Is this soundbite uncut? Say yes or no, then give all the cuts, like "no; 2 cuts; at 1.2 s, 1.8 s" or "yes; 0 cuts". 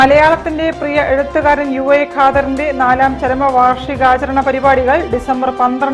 yes; 0 cuts